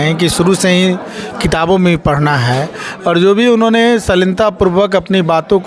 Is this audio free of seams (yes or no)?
yes